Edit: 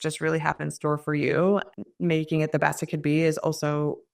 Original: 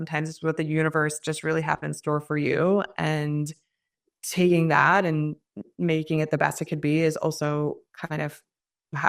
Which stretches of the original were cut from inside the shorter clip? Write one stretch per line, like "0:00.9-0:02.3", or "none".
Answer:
0:02.9-0:05.5

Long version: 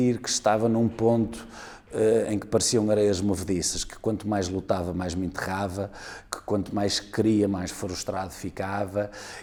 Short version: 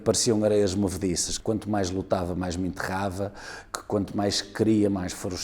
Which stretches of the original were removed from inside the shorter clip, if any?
0:03.8-0:03.9

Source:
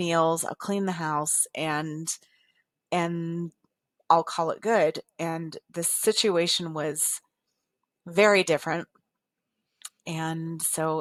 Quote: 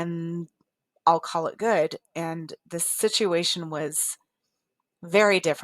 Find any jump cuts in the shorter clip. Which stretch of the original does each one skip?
none

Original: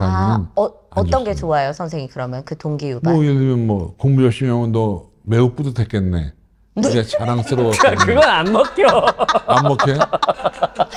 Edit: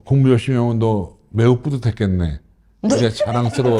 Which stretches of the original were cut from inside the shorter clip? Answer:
none

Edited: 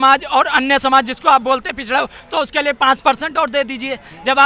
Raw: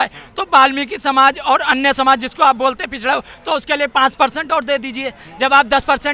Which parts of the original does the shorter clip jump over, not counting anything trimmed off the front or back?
none

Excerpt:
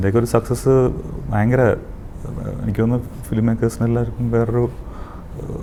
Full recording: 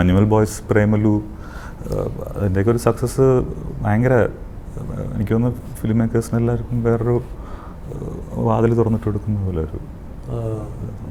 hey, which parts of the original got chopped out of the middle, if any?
none

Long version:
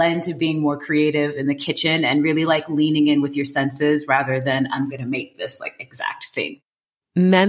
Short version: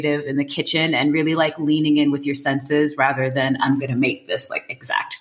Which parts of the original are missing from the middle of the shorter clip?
none

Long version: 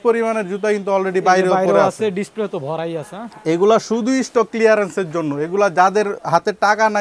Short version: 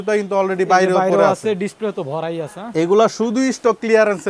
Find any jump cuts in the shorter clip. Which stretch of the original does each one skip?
0:03.1-0:03.3

